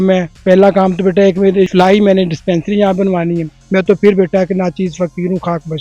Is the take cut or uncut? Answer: cut